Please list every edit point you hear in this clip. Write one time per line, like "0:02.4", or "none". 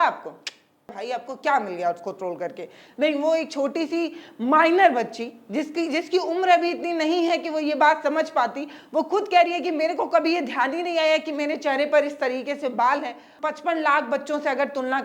0:01.0
0:13.4

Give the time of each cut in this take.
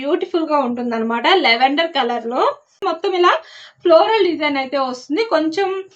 0:02.8

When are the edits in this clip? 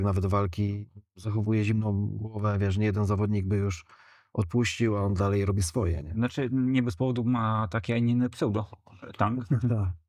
none

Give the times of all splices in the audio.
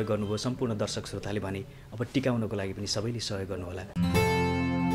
0:03.9

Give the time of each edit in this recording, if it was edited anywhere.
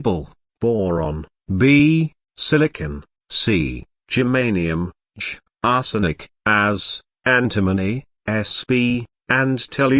0:00.9

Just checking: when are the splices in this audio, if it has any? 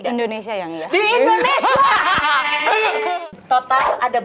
0:03.3

